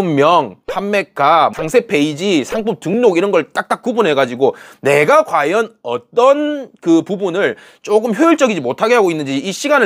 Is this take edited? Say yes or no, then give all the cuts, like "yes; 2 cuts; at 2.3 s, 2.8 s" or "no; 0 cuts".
no; 0 cuts